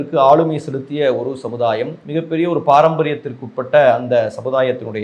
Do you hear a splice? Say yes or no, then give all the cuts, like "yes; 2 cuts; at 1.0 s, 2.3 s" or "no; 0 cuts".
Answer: yes; 1 cut; at 2.0 s